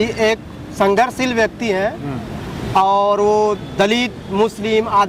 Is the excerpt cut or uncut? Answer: uncut